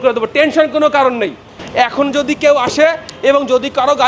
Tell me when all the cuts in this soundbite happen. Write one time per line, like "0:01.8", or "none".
0:01.6